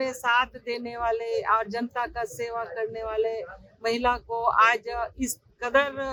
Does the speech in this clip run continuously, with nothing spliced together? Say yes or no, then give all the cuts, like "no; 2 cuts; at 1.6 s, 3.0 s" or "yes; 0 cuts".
yes; 0 cuts